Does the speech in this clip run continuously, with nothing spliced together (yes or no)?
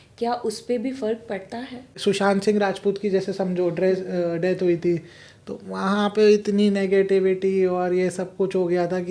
no